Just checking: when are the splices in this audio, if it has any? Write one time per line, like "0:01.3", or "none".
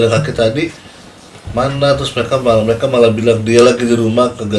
none